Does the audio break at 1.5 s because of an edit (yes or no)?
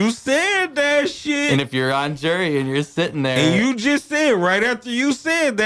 no